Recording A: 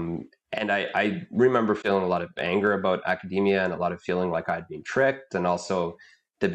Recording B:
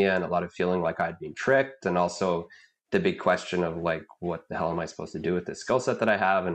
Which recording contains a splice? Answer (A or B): A